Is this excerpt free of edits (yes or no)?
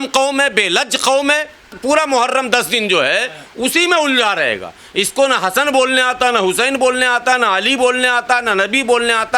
no